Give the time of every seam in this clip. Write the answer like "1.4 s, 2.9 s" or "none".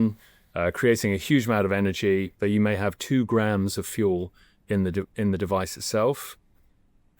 2.3 s